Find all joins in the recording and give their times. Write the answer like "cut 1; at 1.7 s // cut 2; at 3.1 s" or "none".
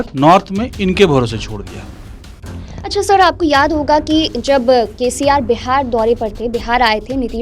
none